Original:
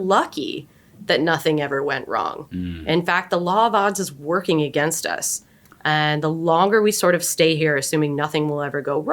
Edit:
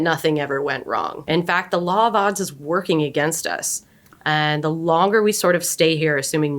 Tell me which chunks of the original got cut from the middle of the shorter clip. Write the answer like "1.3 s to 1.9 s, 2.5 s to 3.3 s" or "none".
2.4 s to 2.8 s